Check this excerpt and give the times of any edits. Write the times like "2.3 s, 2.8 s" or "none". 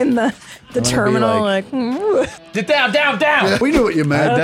2.4 s, 3.6 s